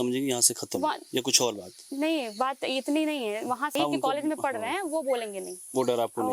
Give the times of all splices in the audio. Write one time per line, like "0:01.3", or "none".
0:03.7